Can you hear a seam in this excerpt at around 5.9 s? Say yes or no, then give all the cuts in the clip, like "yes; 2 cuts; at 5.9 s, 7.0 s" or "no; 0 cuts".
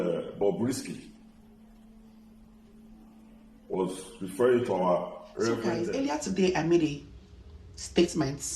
yes; 1 cut; at 5.9 s